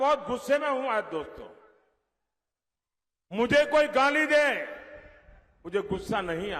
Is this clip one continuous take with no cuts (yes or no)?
yes